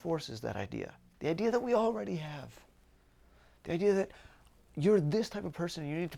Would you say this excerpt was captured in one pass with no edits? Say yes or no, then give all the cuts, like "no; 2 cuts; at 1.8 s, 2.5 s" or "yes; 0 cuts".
no; 1 cut; at 1.0 s